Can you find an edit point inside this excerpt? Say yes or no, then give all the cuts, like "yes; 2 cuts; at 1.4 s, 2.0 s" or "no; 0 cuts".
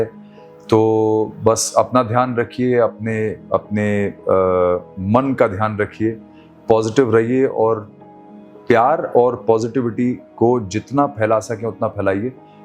no; 0 cuts